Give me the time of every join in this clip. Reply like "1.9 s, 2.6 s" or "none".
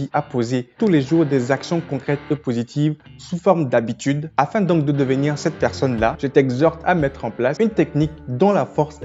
none